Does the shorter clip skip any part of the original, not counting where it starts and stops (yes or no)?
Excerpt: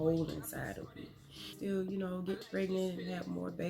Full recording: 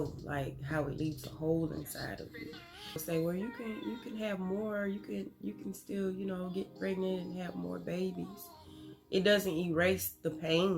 yes